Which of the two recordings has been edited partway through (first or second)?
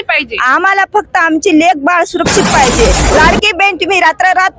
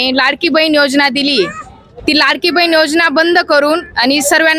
first